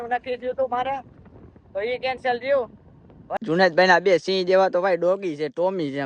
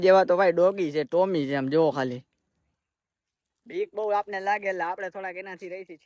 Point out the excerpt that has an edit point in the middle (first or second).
first